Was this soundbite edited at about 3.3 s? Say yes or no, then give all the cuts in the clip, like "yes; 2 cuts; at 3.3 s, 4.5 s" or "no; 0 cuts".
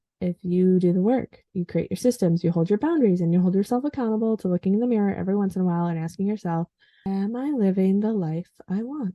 no; 1 cut; at 7.1 s